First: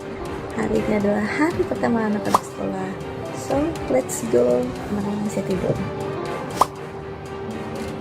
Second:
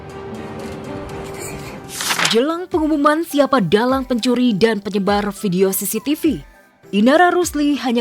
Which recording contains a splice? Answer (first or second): second